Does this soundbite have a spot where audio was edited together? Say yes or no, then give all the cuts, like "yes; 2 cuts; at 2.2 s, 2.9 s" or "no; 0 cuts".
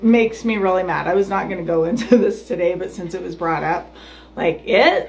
no; 0 cuts